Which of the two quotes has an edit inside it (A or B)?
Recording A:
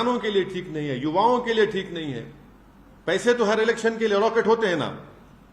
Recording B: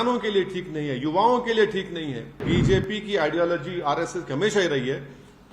B